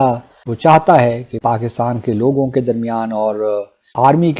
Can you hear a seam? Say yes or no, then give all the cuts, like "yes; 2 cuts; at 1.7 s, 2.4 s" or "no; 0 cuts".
yes; 1 cut; at 1.4 s